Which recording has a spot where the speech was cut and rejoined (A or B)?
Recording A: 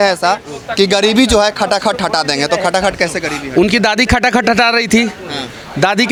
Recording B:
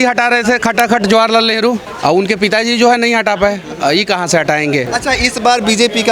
B